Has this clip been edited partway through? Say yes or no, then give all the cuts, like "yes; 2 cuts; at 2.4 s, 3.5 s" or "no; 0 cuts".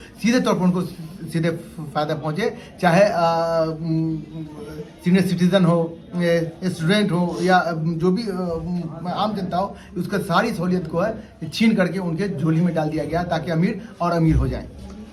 no; 0 cuts